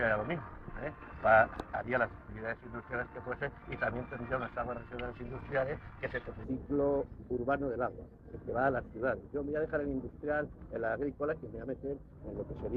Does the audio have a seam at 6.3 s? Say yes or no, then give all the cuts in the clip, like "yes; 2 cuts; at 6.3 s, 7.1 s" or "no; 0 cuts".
no; 0 cuts